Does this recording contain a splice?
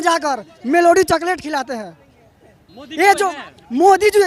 no; 0 cuts

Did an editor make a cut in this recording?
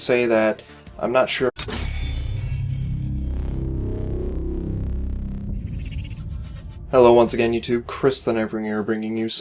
no; 0 cuts

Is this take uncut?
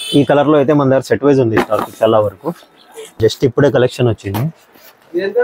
no; 1 cut; at 3.1 s

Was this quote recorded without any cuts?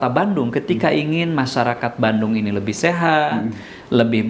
yes; 0 cuts

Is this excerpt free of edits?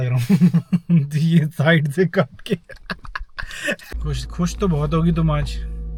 yes; 0 cuts

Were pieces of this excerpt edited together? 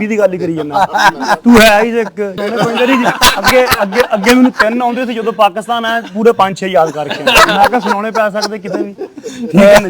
yes; 1 cut; at 2.4 s

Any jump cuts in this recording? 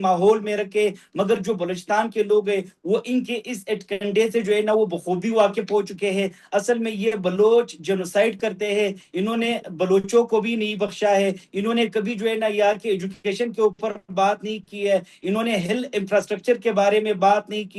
no; 0 cuts

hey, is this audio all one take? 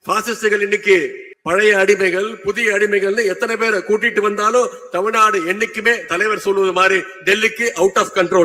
no; 1 cut; at 1.3 s

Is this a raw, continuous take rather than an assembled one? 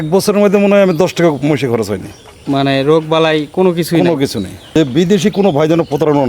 no; 1 cut; at 4.7 s

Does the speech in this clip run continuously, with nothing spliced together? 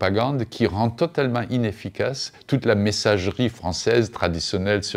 yes; 0 cuts

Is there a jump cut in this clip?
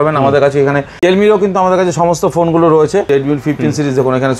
yes; 2 cuts; at 0.9 s, 3.1 s

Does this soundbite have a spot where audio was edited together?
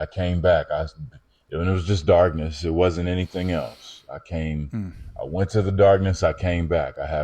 yes; 1 cut; at 4.8 s

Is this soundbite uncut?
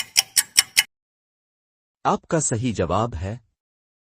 no; 1 cut; at 1.3 s

